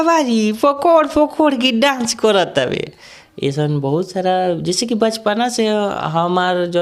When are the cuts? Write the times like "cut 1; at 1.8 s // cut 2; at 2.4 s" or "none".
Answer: none